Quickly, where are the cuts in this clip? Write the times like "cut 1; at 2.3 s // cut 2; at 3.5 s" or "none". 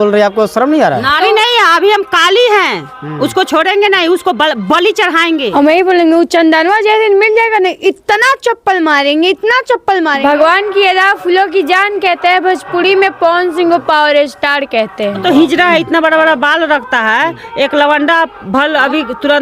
cut 1; at 5.5 s // cut 2; at 10.1 s // cut 3; at 15.2 s